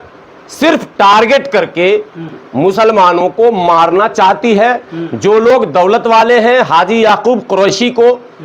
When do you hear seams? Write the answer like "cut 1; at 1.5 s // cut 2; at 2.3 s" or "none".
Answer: none